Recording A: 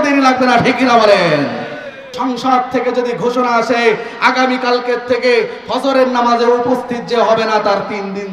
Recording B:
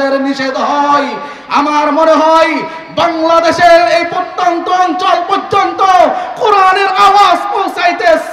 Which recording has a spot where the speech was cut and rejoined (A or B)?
A